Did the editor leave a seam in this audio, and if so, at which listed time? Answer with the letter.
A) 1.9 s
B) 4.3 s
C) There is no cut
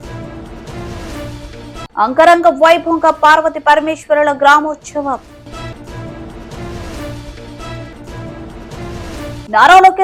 C